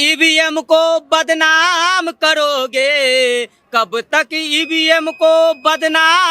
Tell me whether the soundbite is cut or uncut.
uncut